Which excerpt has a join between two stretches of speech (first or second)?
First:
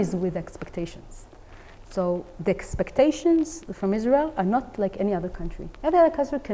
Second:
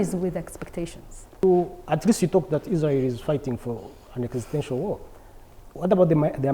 second